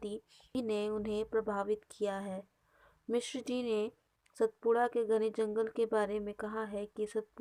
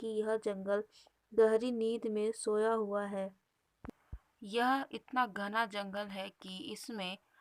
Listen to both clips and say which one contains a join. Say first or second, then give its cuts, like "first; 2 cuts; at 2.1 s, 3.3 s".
second; 1 cut; at 3.9 s